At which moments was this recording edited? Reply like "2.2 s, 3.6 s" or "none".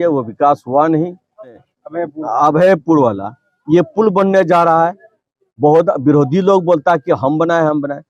1.6 s

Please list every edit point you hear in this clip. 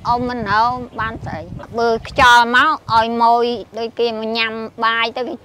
1.6 s

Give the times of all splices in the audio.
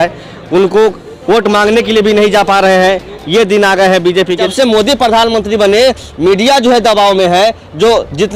4.5 s

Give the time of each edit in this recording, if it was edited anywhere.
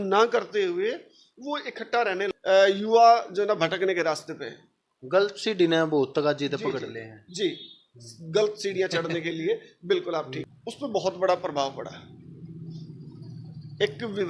2.3 s, 10.4 s

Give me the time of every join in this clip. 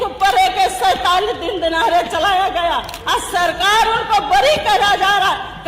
2.9 s

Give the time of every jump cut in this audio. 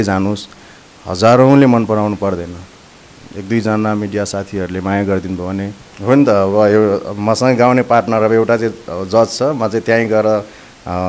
5.9 s

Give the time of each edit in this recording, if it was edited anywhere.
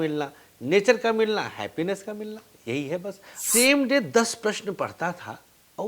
3.3 s

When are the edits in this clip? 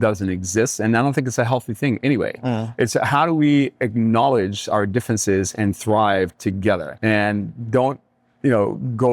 6.9 s

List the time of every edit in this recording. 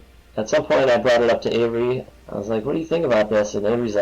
2.1 s

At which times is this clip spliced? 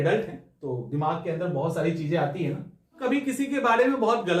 3.0 s

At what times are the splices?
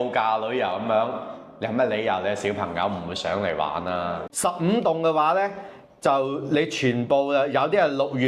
4.3 s

